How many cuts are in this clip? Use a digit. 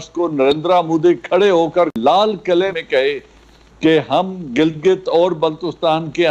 2